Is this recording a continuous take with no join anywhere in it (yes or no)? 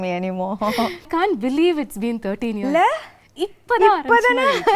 no